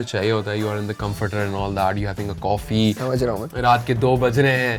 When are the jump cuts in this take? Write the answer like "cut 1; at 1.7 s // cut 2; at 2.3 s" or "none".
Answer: none